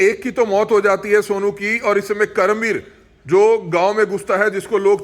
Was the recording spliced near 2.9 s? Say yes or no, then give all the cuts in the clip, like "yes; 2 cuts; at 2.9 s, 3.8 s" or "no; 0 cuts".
no; 0 cuts